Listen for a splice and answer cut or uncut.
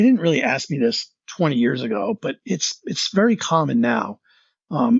uncut